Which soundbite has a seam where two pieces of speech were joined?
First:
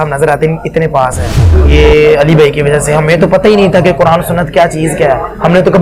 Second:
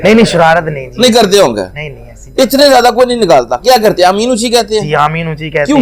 first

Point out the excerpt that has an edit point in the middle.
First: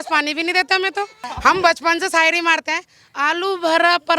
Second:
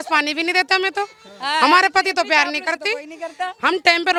first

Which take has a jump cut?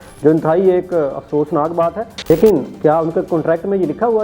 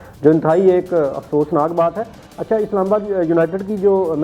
first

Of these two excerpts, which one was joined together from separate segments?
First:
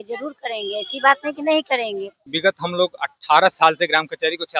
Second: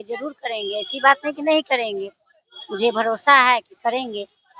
first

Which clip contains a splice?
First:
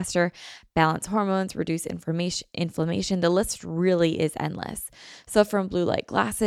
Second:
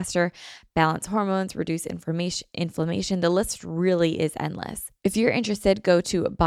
second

